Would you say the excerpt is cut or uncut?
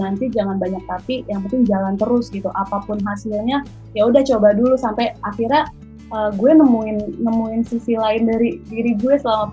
uncut